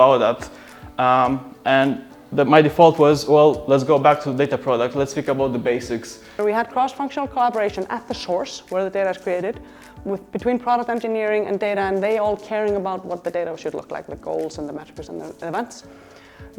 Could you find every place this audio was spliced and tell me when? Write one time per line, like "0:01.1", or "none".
0:06.4